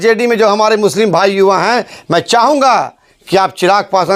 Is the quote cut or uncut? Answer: uncut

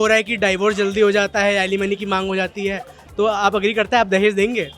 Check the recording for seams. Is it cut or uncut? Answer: cut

